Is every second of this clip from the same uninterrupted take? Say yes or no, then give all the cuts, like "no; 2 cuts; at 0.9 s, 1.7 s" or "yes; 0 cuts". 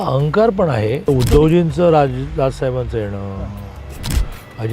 no; 1 cut; at 1.1 s